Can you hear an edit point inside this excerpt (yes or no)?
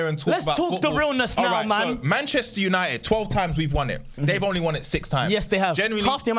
no